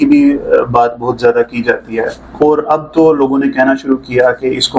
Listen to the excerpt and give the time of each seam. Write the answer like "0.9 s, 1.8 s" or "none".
2.2 s